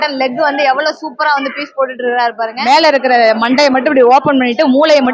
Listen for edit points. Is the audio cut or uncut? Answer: cut